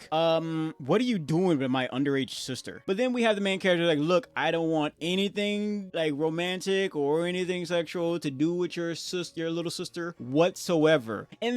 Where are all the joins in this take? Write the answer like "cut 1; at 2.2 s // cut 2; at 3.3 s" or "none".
cut 1; at 2.7 s